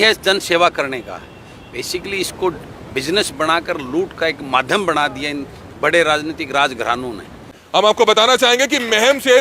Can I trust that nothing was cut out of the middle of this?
no; 1 cut; at 7.8 s

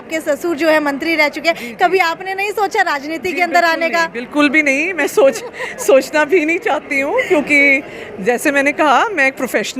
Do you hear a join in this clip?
no; 0 cuts

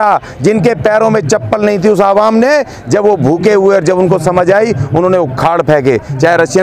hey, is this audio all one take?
yes; 0 cuts

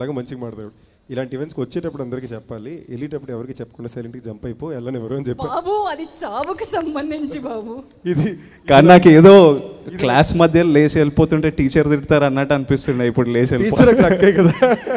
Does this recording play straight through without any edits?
yes; 0 cuts

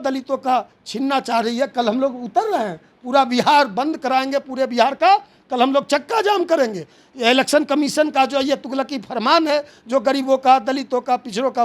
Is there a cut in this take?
no; 0 cuts

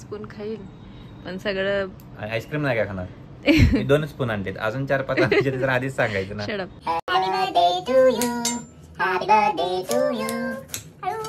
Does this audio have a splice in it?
yes; 1 cut; at 6.7 s

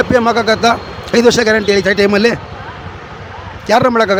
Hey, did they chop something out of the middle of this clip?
no; 0 cuts

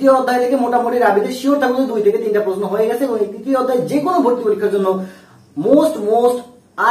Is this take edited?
no; 0 cuts

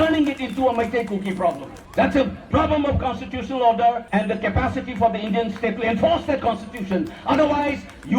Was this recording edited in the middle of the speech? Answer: yes; 2 cuts; at 1.7 s, 4.0 s

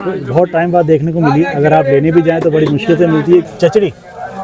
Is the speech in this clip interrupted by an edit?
yes; 1 cut; at 3.5 s

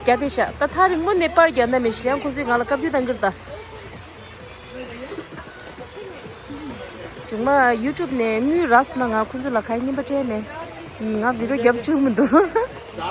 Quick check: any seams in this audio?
no; 0 cuts

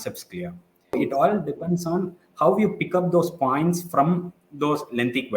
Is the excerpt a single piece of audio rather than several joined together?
no; 1 cut; at 1.0 s

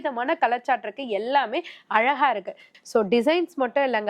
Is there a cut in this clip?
yes; 1 cut; at 2.7 s

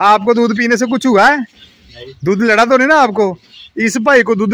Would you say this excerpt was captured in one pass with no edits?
yes; 0 cuts

